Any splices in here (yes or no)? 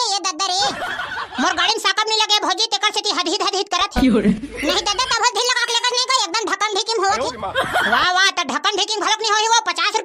no